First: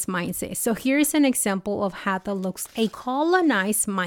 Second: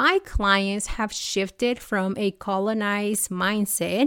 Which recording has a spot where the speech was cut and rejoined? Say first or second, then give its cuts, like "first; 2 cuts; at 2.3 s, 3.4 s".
first; 1 cut; at 2.8 s